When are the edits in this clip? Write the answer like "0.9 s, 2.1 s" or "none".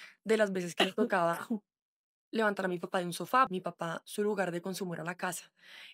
3.5 s